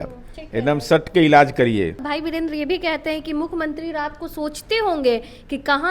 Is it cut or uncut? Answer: cut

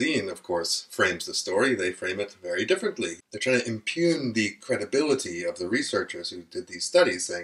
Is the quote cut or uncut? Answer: cut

